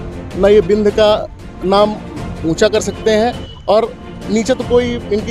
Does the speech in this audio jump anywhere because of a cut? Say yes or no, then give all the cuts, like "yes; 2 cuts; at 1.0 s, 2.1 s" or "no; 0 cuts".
no; 0 cuts